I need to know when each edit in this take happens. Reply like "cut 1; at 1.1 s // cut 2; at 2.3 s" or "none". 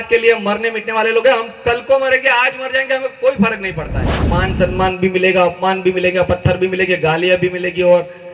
cut 1; at 4.2 s